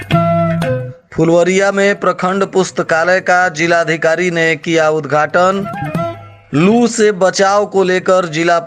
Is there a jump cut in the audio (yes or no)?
yes